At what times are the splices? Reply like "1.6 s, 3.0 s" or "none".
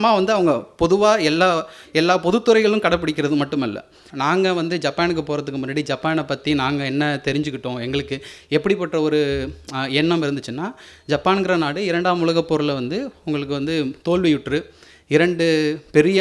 4.0 s